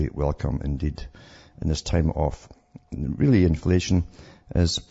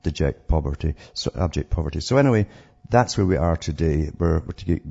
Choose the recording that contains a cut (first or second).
second